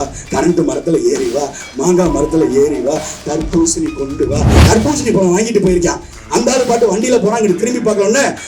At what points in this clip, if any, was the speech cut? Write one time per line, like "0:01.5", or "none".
0:04.5